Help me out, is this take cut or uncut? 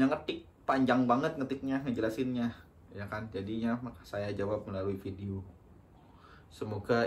uncut